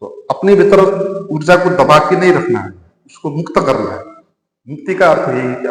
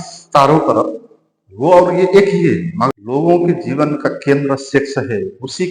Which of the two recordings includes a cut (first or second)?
second